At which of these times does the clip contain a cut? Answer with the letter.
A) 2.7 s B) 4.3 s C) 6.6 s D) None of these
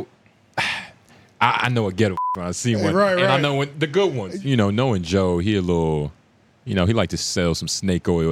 B